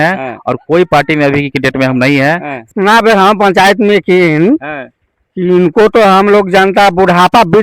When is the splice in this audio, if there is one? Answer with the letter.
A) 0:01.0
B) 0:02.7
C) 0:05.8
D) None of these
B